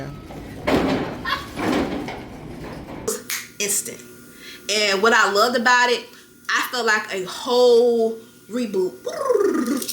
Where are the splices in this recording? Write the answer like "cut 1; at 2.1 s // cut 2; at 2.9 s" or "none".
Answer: cut 1; at 3.1 s